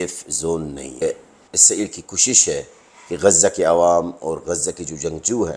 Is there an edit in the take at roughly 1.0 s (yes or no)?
yes